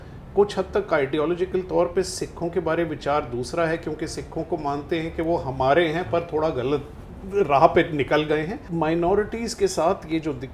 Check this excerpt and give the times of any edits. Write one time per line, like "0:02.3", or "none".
0:08.6